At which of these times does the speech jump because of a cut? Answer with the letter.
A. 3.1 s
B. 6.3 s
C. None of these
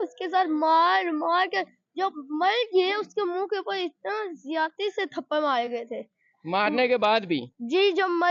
C